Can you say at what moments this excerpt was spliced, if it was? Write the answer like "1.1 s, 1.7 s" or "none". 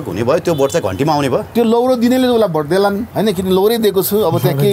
1.5 s, 3.1 s